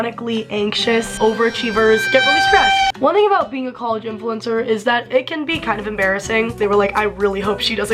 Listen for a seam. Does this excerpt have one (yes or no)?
yes